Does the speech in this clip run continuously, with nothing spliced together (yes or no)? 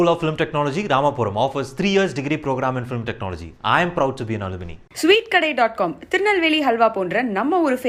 yes